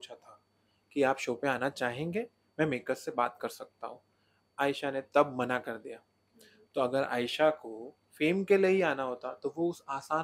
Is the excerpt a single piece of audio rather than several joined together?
yes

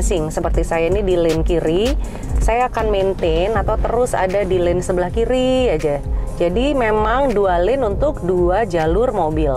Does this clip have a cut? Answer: no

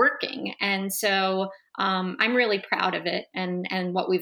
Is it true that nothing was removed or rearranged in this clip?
yes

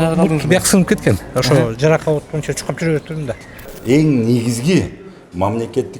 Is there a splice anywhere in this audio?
yes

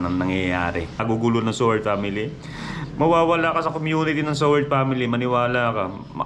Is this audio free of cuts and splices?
no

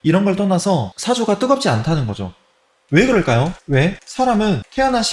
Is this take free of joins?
yes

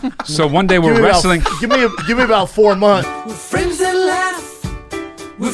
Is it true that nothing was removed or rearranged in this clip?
no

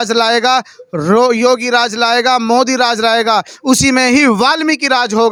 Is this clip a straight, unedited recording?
yes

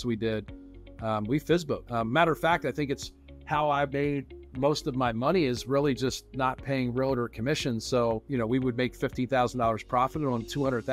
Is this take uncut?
no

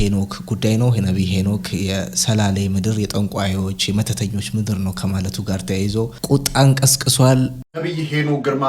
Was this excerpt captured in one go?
no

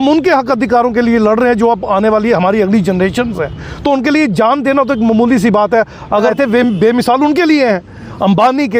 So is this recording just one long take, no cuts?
no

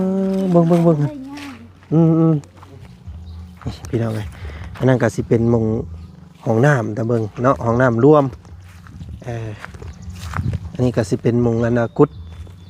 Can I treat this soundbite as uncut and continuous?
no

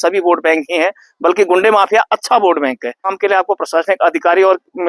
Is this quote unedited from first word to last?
no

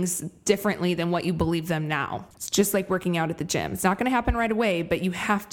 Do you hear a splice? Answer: yes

